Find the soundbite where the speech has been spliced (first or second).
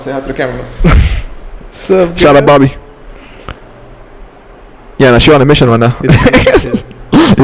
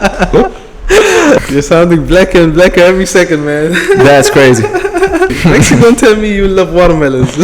second